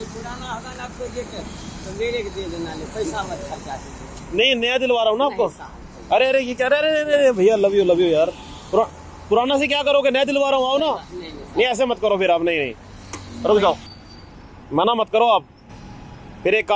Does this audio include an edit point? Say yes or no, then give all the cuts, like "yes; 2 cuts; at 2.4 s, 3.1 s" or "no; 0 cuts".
no; 0 cuts